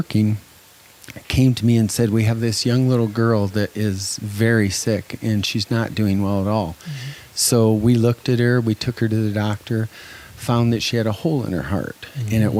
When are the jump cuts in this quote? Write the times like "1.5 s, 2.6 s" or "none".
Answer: none